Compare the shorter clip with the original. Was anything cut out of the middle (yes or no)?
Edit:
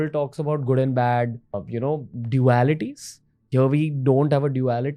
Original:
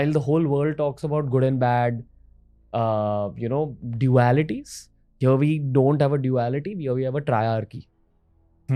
yes